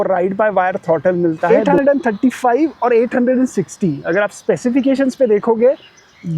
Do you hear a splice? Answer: yes; 1 cut; at 1.5 s

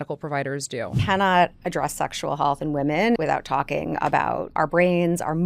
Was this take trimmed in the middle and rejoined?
yes; 3 cuts; at 1.0 s, 3.2 s, 4.5 s

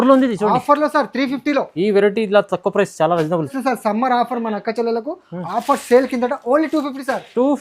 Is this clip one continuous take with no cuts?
no; 1 cut; at 3.6 s

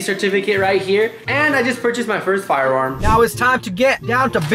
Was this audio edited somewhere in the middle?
yes; 1 cut; at 3.0 s

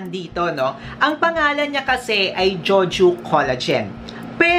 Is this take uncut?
yes; 0 cuts

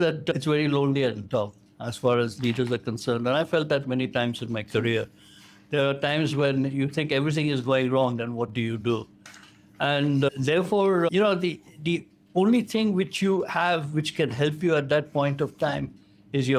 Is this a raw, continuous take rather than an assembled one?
yes; 0 cuts

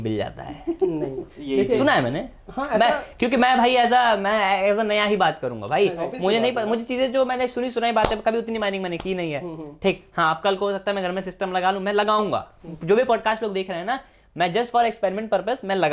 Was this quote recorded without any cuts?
yes; 0 cuts

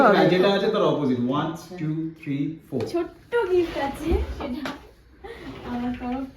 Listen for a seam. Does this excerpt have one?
yes; 1 cut; at 2.9 s

